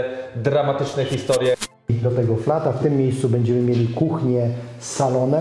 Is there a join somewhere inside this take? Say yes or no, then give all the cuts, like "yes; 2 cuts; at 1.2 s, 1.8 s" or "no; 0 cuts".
yes; 1 cut; at 1.8 s